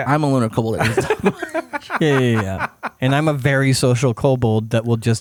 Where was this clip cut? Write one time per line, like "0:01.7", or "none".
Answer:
none